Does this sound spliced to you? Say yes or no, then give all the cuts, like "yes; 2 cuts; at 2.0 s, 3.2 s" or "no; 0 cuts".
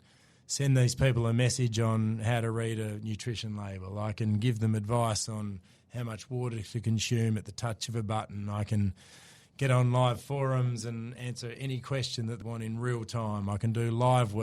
yes; 1 cut; at 12.4 s